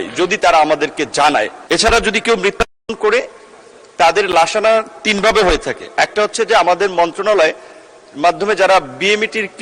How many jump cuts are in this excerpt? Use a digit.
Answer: 1